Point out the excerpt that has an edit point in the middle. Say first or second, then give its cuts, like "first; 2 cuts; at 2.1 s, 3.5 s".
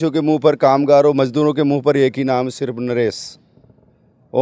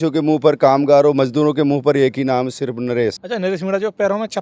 second; 1 cut; at 3.2 s